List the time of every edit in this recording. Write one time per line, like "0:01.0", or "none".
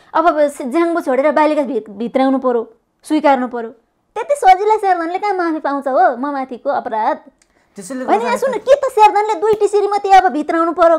none